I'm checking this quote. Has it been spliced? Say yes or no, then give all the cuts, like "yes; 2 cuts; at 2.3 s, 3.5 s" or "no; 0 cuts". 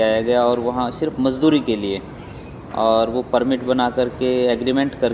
no; 0 cuts